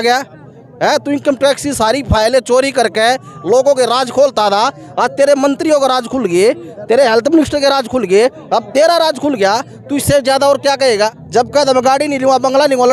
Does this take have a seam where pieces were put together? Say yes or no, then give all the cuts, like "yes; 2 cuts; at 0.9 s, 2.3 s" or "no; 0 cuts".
yes; 1 cut; at 11.2 s